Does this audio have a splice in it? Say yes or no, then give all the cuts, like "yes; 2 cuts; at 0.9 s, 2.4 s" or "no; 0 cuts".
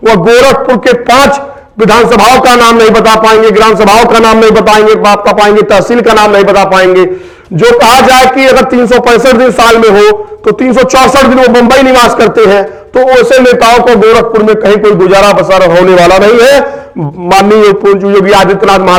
no; 0 cuts